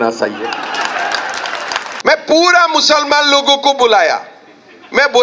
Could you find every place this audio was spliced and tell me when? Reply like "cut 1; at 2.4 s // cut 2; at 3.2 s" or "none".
cut 1; at 1.9 s